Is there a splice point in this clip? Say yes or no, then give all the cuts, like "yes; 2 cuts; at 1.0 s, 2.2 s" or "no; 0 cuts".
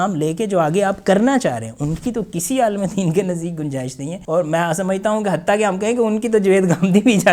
yes; 1 cut; at 4.1 s